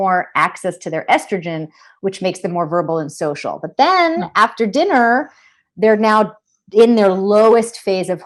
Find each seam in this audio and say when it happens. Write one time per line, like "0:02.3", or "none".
none